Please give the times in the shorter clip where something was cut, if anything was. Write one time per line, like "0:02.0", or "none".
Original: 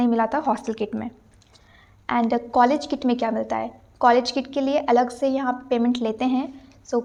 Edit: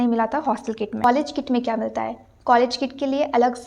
0:01.0